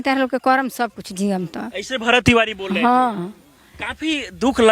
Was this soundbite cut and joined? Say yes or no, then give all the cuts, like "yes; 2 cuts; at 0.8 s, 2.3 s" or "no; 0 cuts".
no; 0 cuts